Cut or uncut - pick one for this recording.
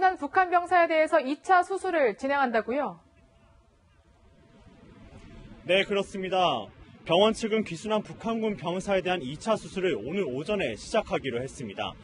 cut